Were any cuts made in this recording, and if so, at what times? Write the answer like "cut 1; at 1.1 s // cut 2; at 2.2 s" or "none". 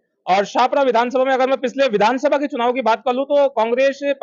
none